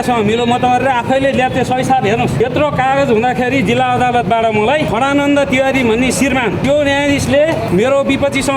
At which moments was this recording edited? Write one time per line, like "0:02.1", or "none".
0:02.4
0:04.9
0:06.6
0:07.7